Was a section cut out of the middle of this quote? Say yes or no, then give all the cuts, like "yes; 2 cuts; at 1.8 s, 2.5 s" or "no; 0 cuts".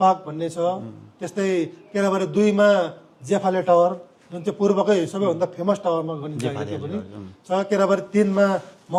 no; 0 cuts